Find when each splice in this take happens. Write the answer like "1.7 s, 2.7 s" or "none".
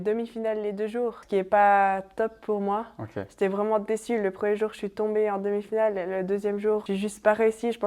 1.2 s, 6.8 s